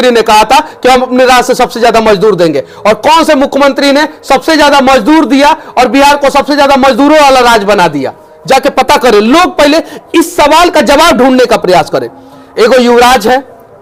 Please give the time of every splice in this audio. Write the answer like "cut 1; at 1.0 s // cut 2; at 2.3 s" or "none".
none